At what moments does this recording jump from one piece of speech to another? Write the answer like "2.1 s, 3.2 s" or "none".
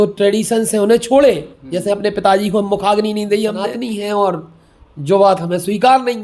3.7 s